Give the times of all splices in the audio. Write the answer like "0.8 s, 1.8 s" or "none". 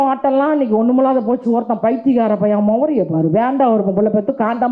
none